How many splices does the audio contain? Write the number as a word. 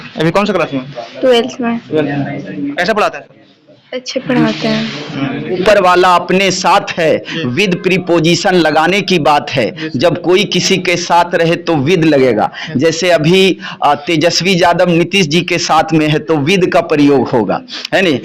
one